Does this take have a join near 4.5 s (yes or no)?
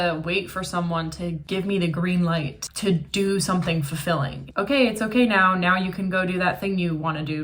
yes